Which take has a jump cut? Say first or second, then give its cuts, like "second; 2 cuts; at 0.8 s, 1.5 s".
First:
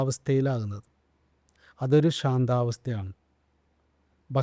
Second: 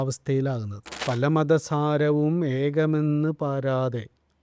second; 1 cut; at 1.0 s